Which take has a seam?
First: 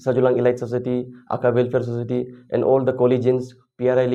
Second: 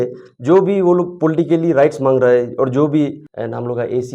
second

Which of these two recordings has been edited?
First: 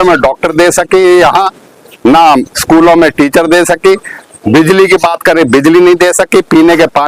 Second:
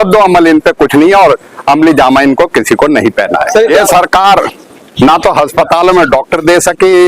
second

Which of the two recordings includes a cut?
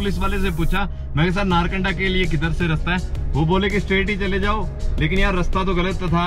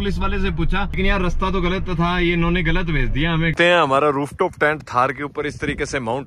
second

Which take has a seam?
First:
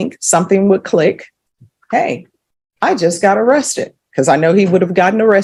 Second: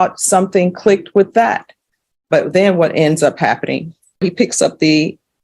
second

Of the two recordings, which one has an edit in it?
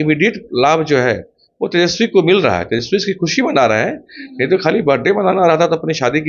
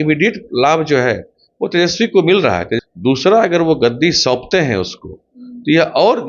second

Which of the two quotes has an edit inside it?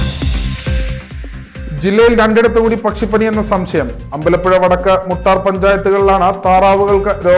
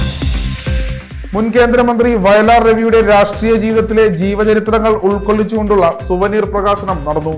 first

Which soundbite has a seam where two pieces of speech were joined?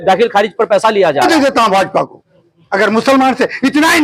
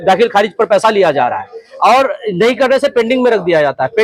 first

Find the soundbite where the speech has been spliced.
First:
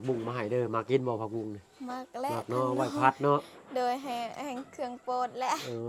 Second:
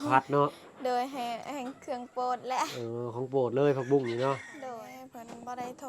second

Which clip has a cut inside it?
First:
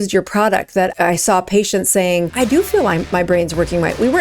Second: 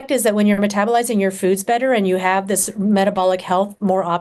first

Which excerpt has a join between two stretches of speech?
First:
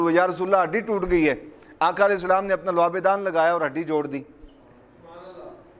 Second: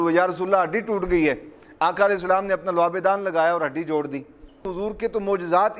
second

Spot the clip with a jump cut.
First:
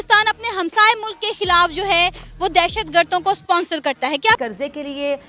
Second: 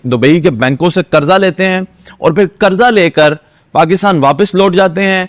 first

